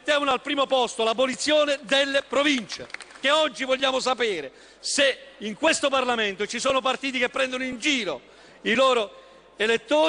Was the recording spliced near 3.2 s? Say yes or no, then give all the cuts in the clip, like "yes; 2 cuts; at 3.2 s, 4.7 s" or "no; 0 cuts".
yes; 1 cut; at 3.2 s